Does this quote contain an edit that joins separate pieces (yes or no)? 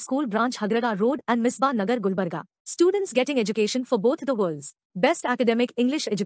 no